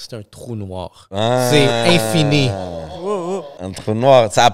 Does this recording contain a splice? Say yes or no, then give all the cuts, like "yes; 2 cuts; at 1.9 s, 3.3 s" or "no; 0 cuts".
yes; 1 cut; at 3.5 s